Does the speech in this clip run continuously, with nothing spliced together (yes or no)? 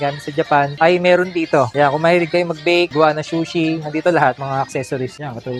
yes